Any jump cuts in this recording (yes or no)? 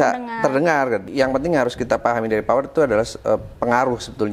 yes